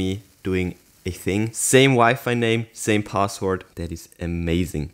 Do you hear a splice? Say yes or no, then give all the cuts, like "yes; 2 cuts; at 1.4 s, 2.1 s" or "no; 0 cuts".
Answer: no; 0 cuts